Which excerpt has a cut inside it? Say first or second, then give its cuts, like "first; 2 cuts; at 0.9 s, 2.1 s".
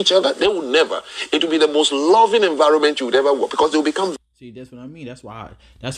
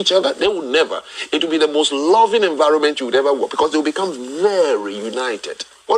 second; 1 cut; at 4.2 s